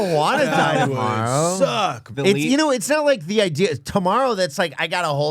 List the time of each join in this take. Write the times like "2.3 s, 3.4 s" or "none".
2.1 s

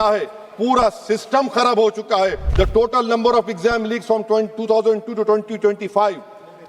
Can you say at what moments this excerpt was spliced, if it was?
2.4 s

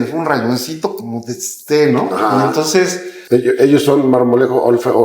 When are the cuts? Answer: 3.0 s

